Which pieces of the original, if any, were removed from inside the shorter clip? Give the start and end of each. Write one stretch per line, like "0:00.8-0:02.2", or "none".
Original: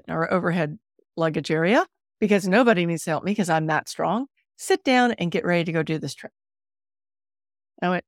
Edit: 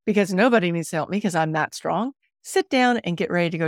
none